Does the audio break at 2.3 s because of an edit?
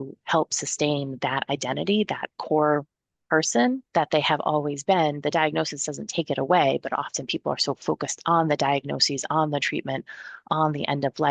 yes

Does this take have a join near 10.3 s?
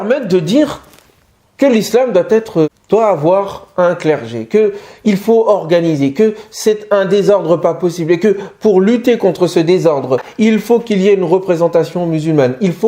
yes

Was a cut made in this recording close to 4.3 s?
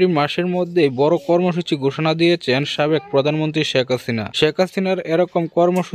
yes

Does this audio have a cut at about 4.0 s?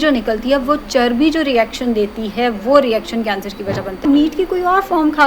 yes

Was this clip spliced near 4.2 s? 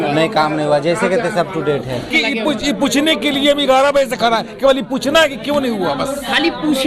no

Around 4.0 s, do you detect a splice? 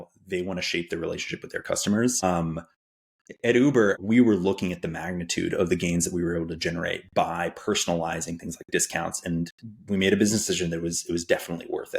yes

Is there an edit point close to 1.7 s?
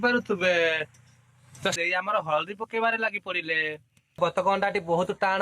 yes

